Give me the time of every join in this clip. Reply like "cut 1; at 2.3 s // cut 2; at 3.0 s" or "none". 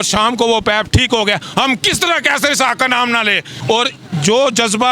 cut 1; at 3.6 s

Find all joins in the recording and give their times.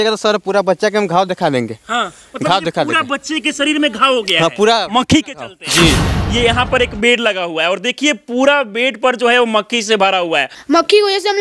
cut 1; at 6.2 s // cut 2; at 10.5 s

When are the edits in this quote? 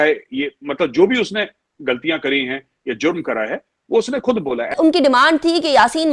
cut 1; at 4.7 s

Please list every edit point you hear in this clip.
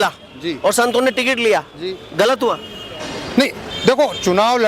none

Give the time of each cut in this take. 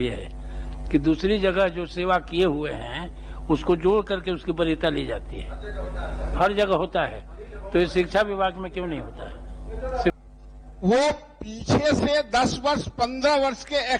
cut 1; at 10.2 s

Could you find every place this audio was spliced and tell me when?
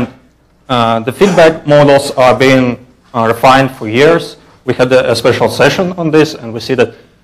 cut 1; at 6.2 s

